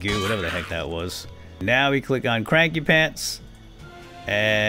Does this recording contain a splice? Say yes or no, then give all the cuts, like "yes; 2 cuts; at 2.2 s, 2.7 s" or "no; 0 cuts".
yes; 1 cut; at 1.6 s